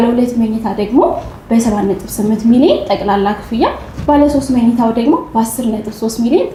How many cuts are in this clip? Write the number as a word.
zero